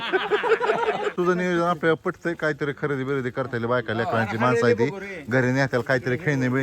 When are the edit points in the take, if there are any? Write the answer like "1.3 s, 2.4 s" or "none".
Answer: 1.1 s